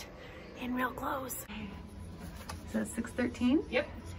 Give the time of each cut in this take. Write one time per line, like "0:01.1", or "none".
0:01.4